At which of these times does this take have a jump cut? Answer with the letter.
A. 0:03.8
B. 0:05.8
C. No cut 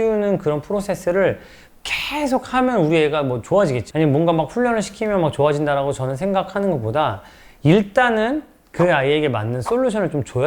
A